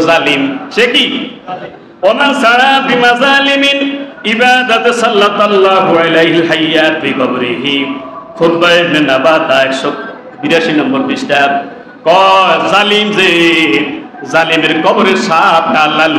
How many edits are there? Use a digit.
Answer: 0